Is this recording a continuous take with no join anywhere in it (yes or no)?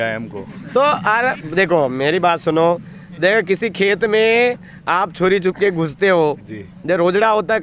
yes